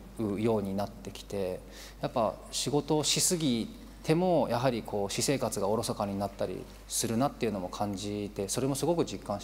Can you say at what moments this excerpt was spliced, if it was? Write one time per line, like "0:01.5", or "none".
none